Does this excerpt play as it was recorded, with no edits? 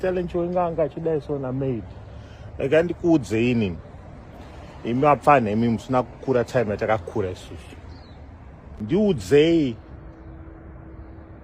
no; 1 cut; at 8.7 s

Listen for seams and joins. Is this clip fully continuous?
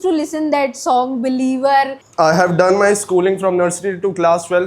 no; 1 cut; at 2.0 s

